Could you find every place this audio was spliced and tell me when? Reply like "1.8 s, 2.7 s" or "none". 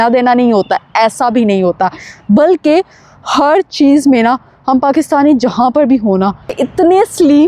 6.5 s